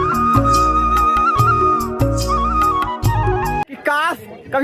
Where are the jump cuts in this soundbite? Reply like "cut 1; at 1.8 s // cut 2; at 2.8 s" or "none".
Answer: cut 1; at 3.6 s